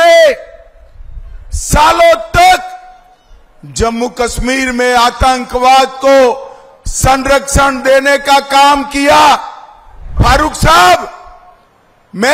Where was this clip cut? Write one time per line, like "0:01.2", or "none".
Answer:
0:10.1